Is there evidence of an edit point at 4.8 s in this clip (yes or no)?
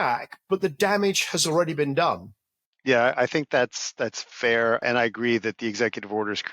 yes